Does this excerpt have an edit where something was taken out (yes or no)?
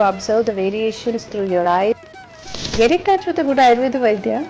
yes